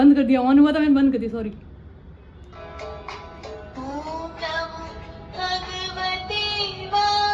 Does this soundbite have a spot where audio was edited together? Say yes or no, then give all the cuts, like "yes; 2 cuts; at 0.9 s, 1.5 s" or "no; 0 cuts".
no; 0 cuts